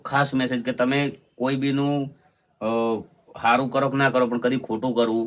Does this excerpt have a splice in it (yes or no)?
no